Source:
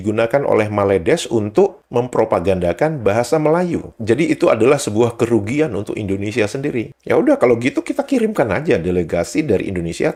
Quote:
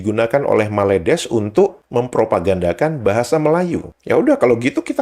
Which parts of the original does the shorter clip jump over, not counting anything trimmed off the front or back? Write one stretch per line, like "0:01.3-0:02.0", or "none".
0:03.9-0:06.9